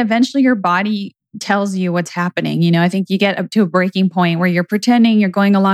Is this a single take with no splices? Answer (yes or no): no